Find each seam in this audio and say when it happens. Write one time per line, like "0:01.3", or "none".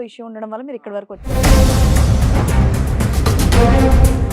0:01.3